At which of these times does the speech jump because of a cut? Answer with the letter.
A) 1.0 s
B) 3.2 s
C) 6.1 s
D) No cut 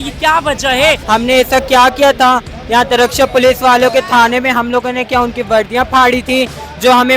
A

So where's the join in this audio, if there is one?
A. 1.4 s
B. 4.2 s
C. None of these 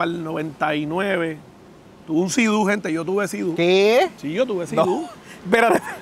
C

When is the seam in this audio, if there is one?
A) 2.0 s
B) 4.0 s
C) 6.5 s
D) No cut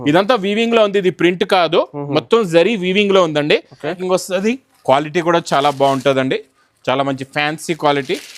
B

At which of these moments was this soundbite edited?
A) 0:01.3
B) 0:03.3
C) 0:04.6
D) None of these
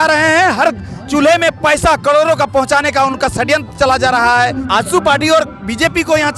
C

